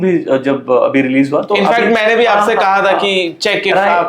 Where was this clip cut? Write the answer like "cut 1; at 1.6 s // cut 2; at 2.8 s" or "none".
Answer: none